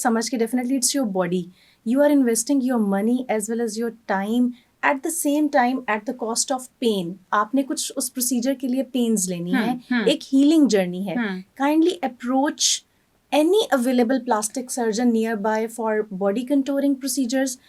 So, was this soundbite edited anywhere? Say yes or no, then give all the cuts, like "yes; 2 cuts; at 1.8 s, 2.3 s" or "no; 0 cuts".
no; 0 cuts